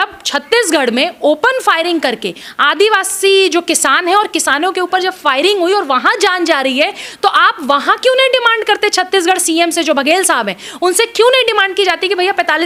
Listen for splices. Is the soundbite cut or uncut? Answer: uncut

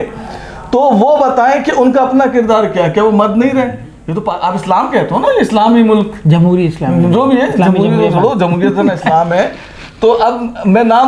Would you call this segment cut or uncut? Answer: cut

